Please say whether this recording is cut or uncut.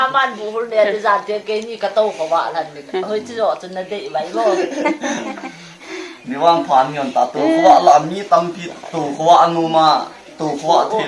uncut